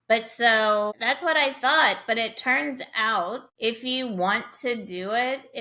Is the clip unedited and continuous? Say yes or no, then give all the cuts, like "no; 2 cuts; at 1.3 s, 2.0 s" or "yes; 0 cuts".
no; 2 cuts; at 1.0 s, 3.5 s